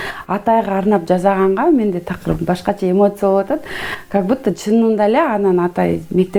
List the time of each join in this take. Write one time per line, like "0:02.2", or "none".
none